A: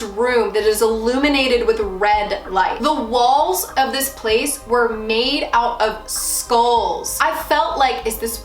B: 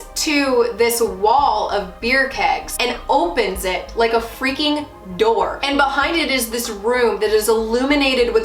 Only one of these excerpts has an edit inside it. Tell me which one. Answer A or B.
A